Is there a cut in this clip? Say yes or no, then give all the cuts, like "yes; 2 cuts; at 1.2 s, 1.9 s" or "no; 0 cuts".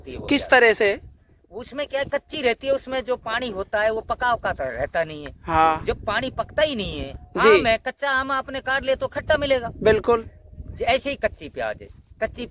no; 0 cuts